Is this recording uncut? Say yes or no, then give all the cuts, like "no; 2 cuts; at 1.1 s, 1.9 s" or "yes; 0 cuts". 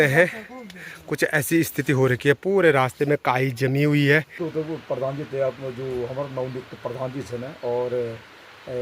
no; 1 cut; at 4.4 s